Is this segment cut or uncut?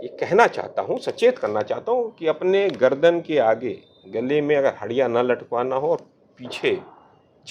uncut